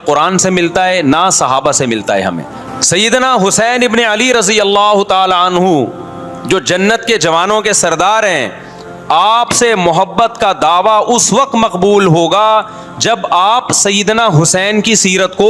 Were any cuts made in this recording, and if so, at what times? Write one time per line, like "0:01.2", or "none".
0:02.5